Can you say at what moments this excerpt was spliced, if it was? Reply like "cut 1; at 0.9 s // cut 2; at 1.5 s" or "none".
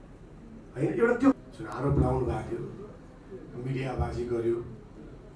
cut 1; at 1.3 s

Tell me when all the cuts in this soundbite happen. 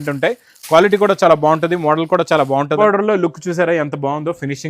cut 1; at 2.8 s

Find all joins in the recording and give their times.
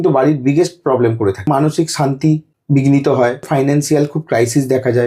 cut 1; at 1.5 s // cut 2; at 2.5 s // cut 3; at 3.5 s

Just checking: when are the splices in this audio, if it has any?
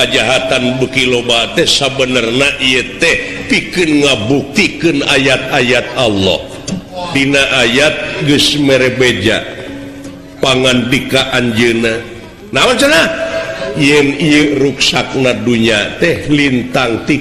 cut 1; at 7.1 s

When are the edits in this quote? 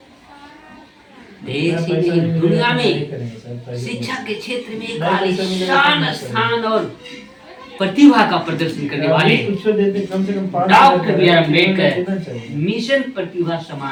none

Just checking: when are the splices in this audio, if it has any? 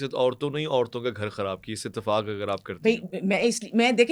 none

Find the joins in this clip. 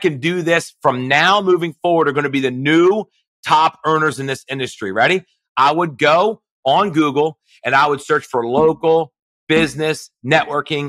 none

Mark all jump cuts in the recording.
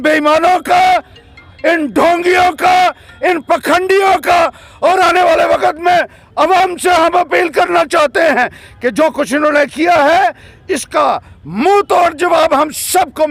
none

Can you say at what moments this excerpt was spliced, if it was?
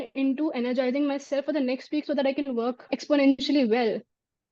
cut 1; at 3.0 s

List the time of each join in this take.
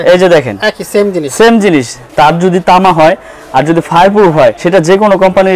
cut 1; at 2.0 s // cut 2; at 4.6 s

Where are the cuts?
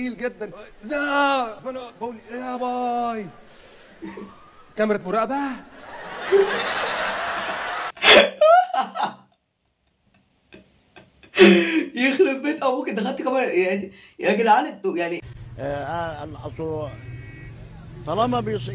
none

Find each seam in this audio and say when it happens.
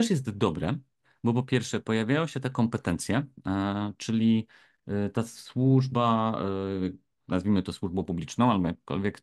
none

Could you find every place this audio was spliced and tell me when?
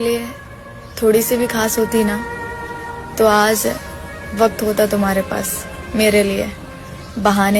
none

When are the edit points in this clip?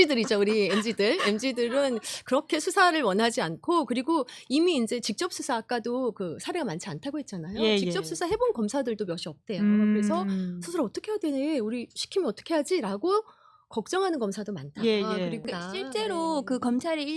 cut 1; at 15.4 s

